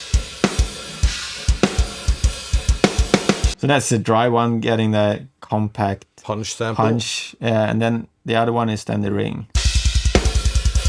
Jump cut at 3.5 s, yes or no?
yes